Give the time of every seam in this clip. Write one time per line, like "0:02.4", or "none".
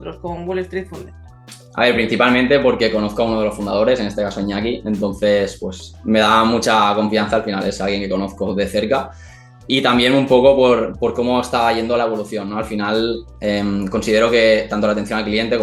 none

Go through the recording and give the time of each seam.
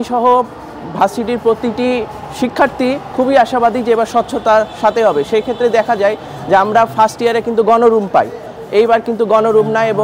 none

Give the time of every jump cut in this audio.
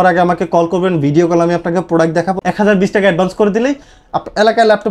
0:02.4

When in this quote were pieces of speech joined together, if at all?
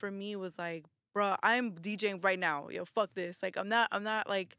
none

